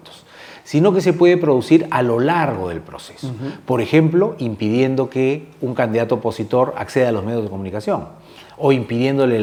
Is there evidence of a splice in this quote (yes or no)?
no